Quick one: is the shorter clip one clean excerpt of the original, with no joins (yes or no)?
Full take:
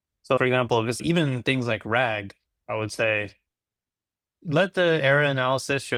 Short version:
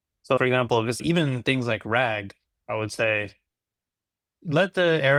yes